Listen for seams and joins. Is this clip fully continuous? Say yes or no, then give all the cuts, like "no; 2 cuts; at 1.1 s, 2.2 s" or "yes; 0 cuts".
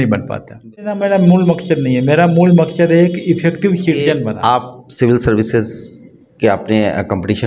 no; 2 cuts; at 1.0 s, 4.3 s